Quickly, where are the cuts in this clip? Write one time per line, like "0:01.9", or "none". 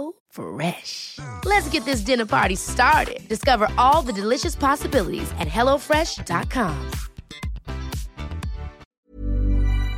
0:09.0